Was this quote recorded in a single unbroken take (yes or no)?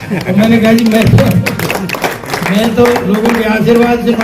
yes